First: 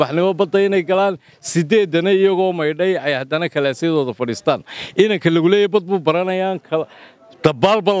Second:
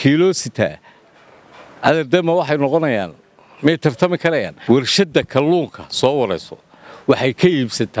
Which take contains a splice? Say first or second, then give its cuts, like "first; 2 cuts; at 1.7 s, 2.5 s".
second; 1 cut; at 4.5 s